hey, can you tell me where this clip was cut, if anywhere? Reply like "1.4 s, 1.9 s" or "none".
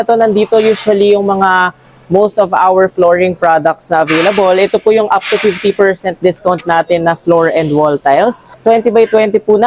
8.6 s